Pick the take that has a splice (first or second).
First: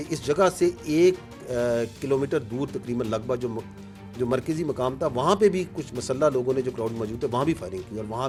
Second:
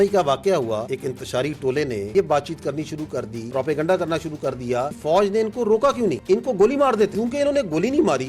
second